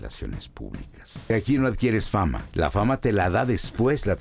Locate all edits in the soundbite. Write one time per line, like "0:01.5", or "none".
0:01.3
0:02.4

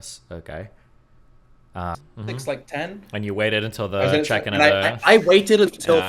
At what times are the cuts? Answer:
0:02.0

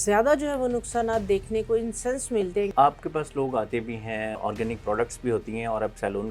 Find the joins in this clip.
0:02.7
0:04.4

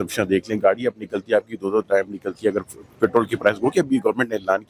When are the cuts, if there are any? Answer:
none

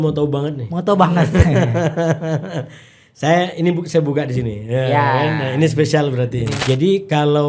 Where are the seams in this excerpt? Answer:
0:06.5

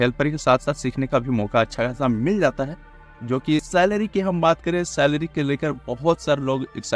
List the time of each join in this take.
0:03.7

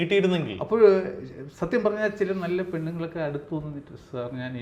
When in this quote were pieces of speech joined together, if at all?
none

